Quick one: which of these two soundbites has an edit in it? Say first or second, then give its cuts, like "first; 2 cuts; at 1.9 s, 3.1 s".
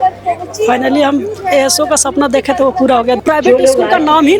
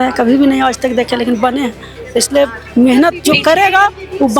first; 1 cut; at 3.2 s